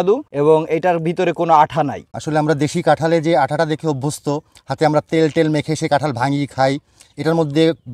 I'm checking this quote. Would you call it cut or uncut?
uncut